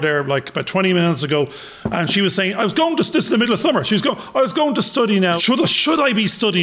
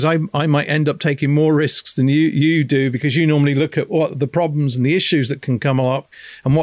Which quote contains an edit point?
first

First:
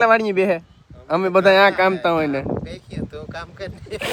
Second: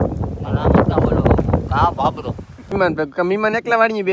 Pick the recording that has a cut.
second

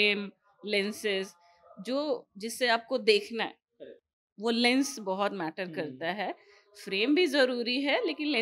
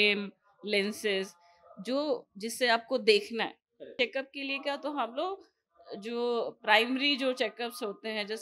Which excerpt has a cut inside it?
second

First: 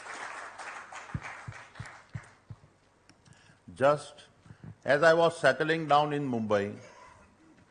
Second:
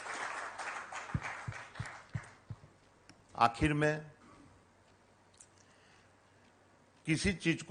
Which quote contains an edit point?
second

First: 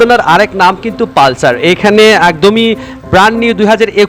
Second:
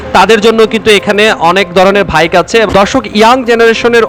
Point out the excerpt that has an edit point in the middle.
second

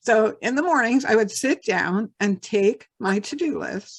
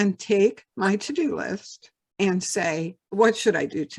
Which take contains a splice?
second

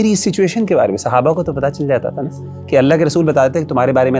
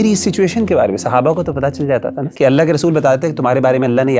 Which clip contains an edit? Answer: second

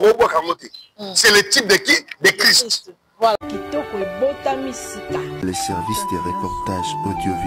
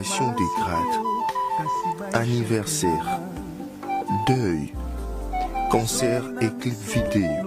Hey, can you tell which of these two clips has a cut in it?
first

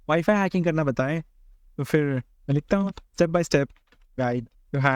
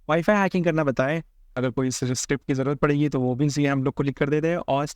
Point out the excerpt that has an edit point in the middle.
second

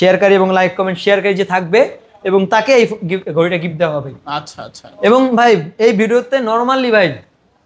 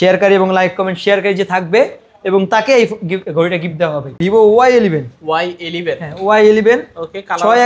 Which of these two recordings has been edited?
second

